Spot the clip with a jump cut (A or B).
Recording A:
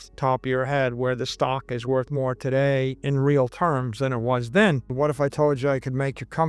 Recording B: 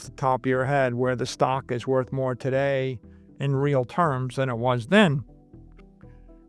A